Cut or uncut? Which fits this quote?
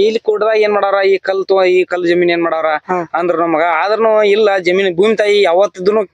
uncut